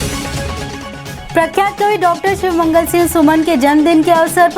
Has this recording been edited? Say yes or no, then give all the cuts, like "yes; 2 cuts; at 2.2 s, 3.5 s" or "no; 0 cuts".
yes; 1 cut; at 1.2 s